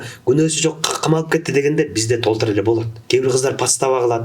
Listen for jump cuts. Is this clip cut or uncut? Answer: cut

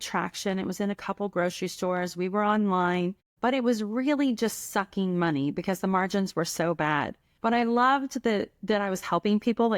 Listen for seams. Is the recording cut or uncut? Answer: cut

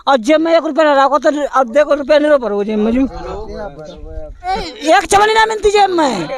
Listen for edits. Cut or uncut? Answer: uncut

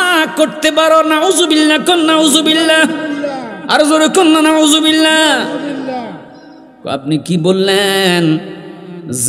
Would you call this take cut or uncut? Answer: uncut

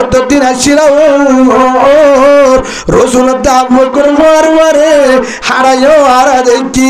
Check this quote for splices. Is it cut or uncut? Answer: uncut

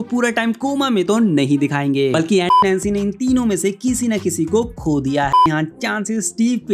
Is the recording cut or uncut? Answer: cut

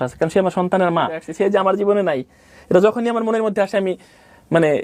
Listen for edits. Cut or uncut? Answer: cut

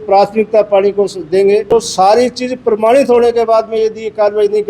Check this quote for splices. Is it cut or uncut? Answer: cut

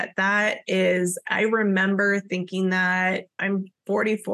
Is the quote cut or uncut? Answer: cut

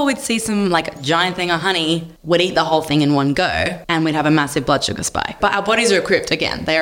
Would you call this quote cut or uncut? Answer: cut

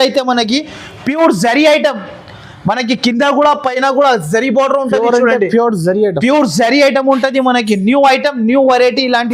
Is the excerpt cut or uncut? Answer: uncut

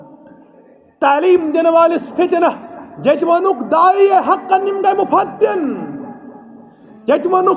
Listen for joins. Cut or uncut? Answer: uncut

